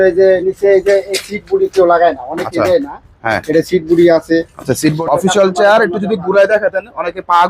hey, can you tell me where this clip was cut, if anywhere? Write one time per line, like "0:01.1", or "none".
0:05.0

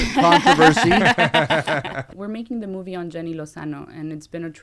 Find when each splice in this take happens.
0:02.1

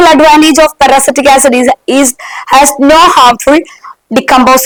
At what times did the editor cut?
none

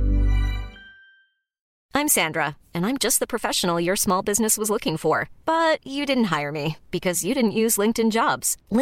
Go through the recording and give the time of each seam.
0:01.8

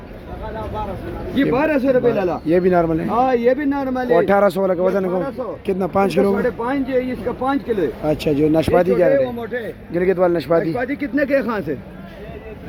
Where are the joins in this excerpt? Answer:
none

